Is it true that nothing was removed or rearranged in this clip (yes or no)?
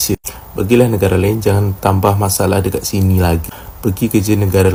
yes